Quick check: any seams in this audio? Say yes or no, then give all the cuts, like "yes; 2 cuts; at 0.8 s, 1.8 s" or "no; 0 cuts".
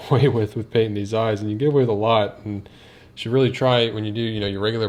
no; 0 cuts